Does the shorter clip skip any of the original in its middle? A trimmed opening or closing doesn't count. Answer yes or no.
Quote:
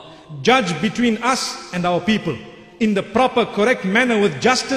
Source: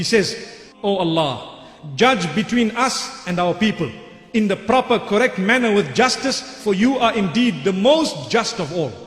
no